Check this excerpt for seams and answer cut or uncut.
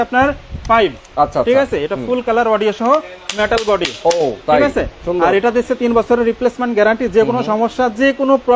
uncut